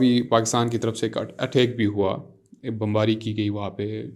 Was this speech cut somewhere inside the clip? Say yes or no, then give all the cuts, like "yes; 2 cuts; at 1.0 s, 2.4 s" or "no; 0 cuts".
no; 0 cuts